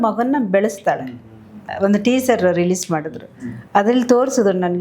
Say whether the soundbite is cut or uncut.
cut